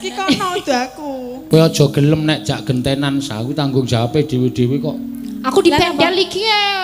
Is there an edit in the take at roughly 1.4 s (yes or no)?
yes